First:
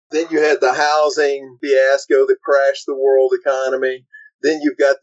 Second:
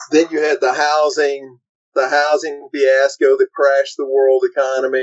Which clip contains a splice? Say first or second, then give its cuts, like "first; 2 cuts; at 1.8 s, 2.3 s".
first; 1 cut; at 1.5 s